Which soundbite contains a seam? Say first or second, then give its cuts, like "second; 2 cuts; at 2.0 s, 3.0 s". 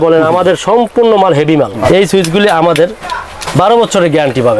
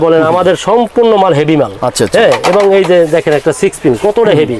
first; 1 cut; at 1.8 s